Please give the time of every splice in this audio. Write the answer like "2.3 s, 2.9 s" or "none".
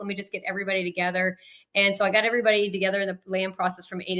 none